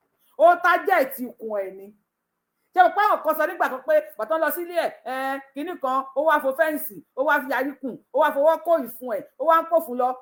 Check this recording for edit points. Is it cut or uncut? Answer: uncut